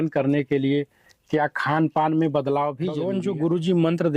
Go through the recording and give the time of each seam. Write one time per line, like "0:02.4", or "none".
0:03.0